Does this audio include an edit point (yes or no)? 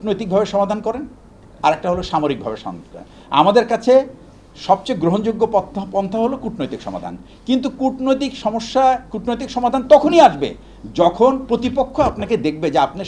no